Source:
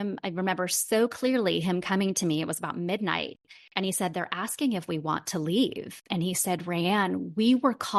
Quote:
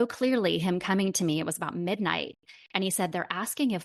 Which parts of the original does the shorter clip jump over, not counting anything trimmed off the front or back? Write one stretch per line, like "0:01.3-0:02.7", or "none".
none

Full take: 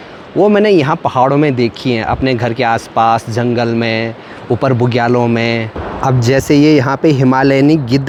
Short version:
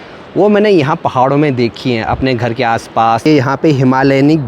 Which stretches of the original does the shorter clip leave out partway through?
0:03.3-0:06.7

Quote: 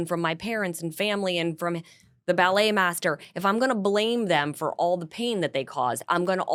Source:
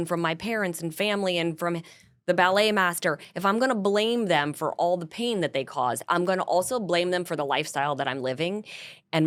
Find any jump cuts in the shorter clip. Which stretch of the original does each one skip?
none

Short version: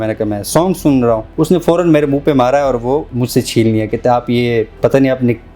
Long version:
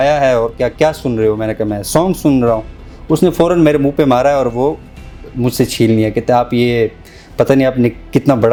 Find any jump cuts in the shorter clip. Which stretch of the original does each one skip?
0:02.7-0:03.0
0:04.9-0:05.4
0:07.0-0:07.3

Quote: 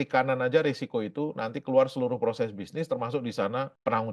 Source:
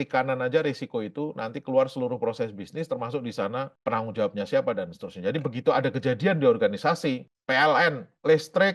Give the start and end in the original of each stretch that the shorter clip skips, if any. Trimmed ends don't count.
none

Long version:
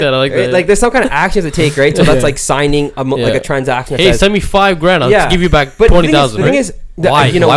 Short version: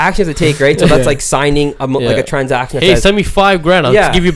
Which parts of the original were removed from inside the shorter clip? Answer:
none

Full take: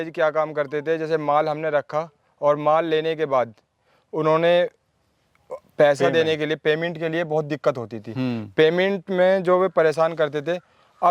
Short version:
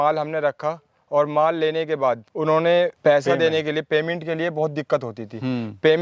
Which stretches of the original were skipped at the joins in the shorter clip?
0:03.6-0:04.1
0:04.7-0:05.7

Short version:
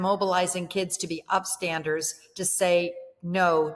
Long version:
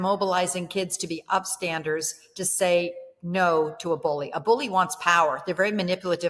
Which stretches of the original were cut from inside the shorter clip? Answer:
none

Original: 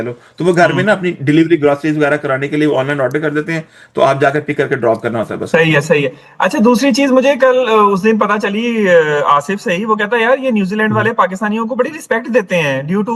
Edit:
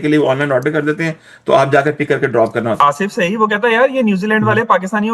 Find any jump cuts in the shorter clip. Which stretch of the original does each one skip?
0:05.3-0:09.3

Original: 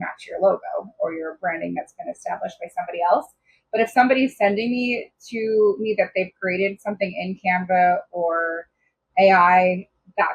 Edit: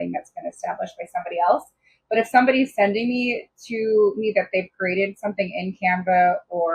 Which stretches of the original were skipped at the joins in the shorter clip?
none

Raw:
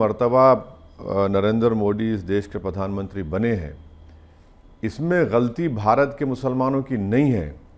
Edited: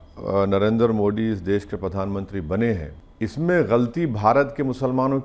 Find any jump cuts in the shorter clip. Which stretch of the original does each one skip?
0:03.8-0:04.6

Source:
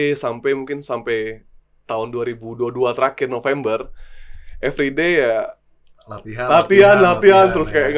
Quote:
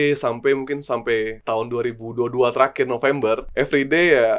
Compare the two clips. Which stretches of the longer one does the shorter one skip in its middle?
0:01.4-0:01.8
0:03.9-0:04.5

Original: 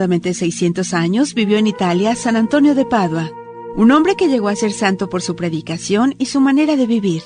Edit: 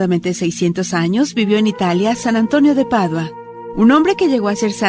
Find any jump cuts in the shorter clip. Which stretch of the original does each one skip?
none

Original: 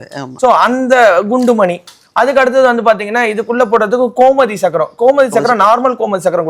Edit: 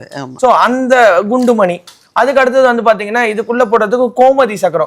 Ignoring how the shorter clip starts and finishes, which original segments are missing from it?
none

